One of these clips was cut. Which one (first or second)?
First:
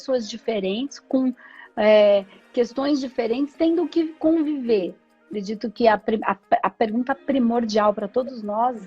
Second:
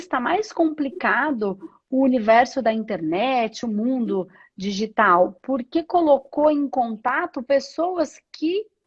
first